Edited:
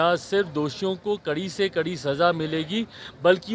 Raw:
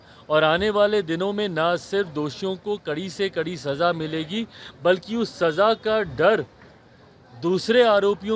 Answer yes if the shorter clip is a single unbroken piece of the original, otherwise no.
yes